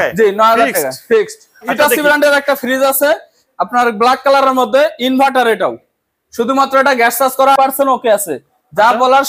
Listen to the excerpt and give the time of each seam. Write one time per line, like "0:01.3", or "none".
0:01.7